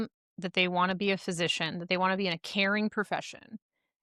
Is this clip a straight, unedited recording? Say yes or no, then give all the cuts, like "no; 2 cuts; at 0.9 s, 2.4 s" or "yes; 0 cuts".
yes; 0 cuts